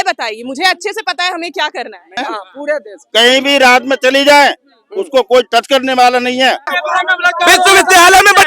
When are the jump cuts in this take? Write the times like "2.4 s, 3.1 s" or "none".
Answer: 2.2 s, 6.7 s